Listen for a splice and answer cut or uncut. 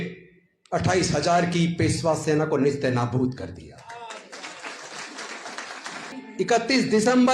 cut